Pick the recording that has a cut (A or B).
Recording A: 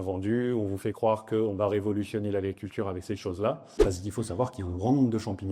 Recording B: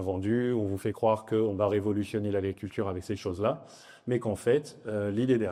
A